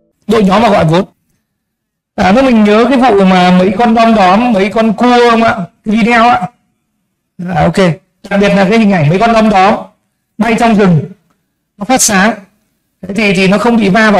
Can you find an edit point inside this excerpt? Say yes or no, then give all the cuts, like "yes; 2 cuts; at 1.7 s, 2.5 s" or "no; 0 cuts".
yes; 1 cut; at 1.1 s